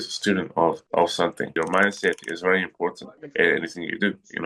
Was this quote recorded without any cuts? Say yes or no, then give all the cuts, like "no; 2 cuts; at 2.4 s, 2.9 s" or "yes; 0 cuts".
no; 1 cut; at 1.5 s